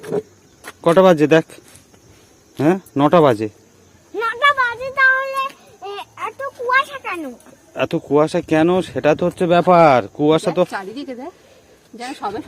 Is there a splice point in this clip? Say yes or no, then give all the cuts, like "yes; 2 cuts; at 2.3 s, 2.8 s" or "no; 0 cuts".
no; 0 cuts